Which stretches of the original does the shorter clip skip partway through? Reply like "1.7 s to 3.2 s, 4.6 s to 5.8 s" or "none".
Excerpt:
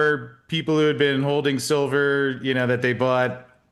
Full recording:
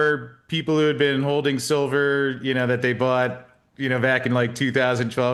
none